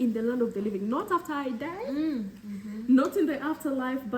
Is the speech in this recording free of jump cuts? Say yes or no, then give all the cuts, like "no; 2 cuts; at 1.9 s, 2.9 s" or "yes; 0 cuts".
yes; 0 cuts